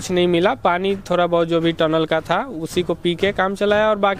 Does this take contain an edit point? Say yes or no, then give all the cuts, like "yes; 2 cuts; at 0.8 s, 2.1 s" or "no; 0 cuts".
no; 0 cuts